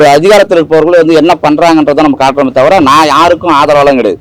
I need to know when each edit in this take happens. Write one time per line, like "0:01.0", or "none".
none